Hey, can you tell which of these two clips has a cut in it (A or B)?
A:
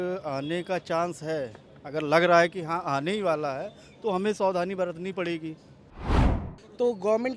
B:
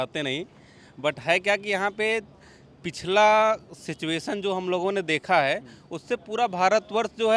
A